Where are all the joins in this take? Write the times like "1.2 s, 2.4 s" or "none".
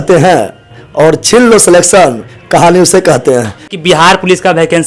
3.8 s